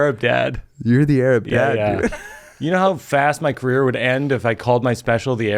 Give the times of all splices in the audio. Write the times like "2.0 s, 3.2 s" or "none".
none